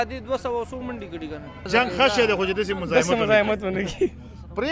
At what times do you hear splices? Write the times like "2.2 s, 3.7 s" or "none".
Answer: 1.6 s